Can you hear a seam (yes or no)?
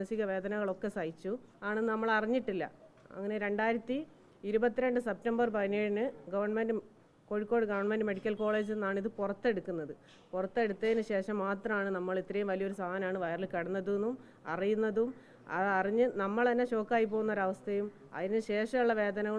yes